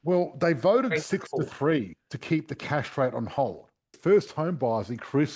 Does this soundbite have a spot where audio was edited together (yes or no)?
yes